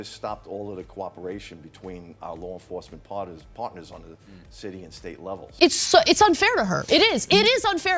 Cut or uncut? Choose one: cut